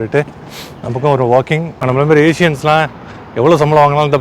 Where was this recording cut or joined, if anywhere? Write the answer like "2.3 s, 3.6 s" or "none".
1.8 s